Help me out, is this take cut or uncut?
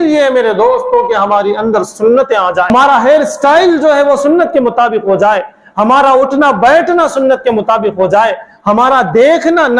cut